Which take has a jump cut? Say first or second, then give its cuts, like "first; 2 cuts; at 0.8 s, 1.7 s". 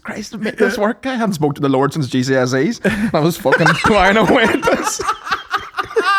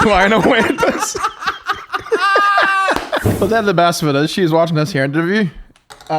second; 1 cut; at 3.3 s